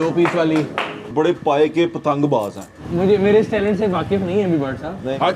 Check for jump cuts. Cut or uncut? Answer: cut